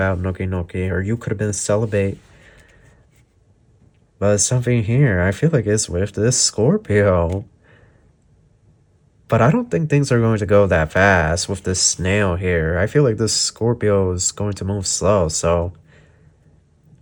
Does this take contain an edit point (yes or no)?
no